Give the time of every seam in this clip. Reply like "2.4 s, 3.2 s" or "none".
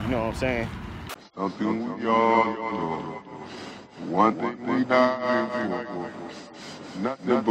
1.2 s